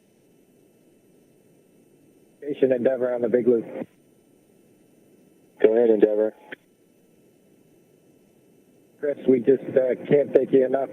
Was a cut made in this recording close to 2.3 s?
no; 4 cuts; at 4.1 s, 5.6 s, 7.1 s, 9.0 s

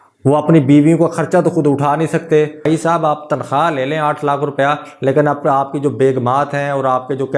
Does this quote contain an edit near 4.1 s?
no; 1 cut; at 2.6 s

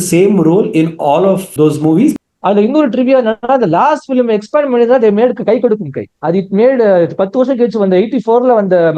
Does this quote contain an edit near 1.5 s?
yes; 2 cuts; at 1.5 s, 2.2 s

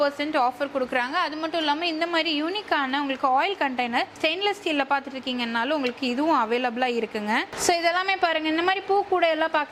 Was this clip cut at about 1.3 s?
no; 0 cuts

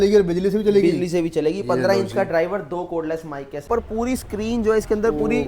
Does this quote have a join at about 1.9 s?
no; 1 cut; at 3.7 s

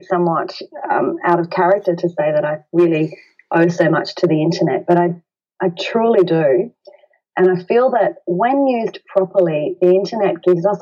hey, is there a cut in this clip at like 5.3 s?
no; 0 cuts

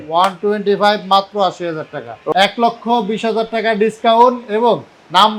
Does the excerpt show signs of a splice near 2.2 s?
yes; 1 cut; at 2.2 s

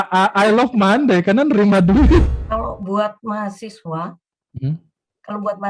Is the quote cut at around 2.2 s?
yes; 1 cut; at 2.2 s

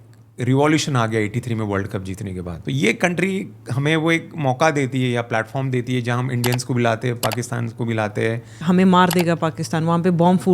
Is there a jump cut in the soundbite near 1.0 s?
no; 2 cuts; at 2.5 s, 8.6 s

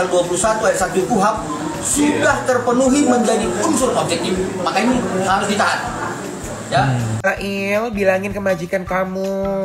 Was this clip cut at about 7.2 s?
yes; 1 cut; at 7.2 s

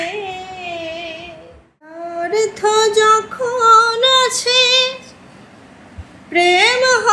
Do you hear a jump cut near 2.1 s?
yes; 1 cut; at 2.1 s

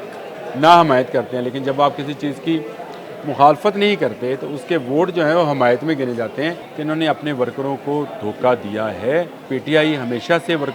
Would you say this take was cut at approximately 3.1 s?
no; 2 cuts; at 6.7 s, 9.5 s

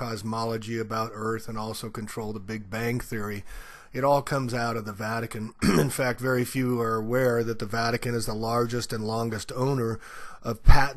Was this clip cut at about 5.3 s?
yes; 1 cut; at 5.3 s

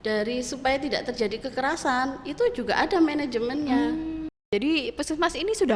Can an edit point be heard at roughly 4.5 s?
yes; 1 cut; at 4.5 s

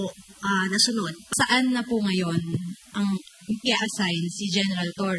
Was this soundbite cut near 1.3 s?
yes; 1 cut; at 1.3 s

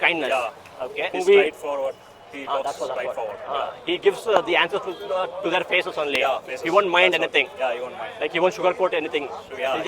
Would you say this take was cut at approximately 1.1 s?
yes; 1 cut; at 1.1 s

